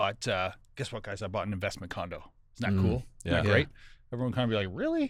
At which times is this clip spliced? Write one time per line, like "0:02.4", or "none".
none